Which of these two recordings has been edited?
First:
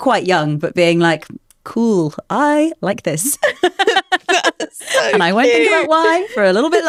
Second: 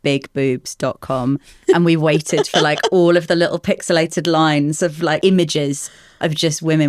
second; 1 cut; at 5.2 s

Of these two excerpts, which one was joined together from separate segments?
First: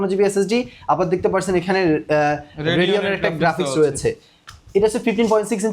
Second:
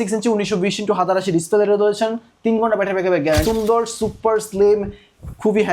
second; 1 cut; at 3.4 s

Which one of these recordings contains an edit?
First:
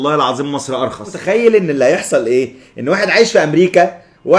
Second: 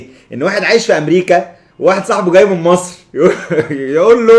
first; 1 cut; at 1.2 s

